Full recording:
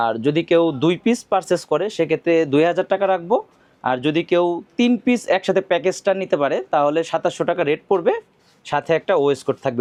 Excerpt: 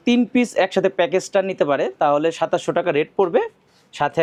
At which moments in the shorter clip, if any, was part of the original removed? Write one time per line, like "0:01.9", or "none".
none